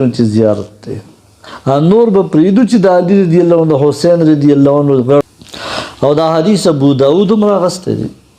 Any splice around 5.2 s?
yes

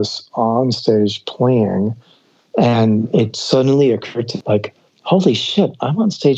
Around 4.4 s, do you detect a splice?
yes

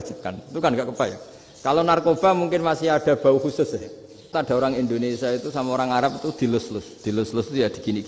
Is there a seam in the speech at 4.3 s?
yes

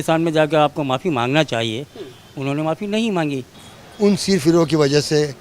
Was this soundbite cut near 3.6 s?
yes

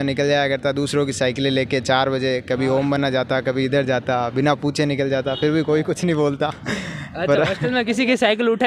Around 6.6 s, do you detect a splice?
no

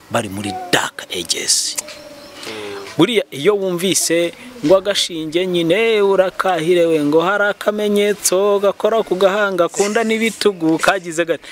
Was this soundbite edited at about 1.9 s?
yes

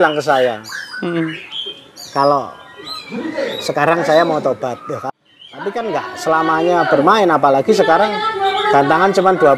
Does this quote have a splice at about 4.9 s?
yes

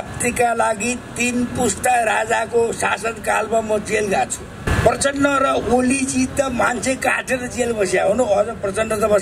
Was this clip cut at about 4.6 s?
yes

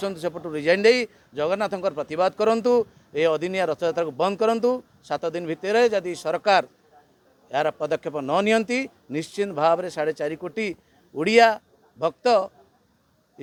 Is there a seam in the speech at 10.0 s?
no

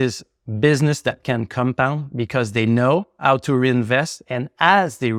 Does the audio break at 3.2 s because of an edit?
no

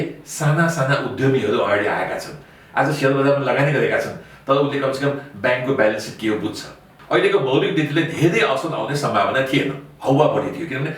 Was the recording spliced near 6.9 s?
yes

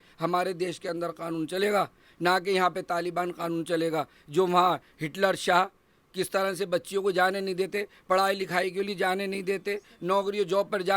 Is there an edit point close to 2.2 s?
no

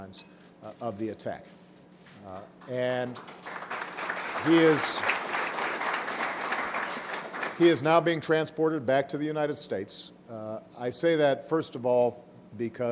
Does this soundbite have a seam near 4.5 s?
yes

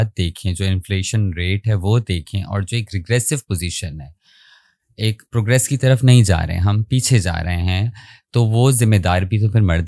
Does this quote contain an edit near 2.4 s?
no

